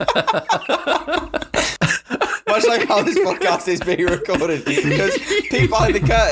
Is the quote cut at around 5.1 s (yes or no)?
no